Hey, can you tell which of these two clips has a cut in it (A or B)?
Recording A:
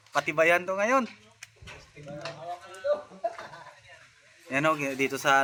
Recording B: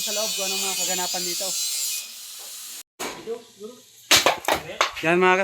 B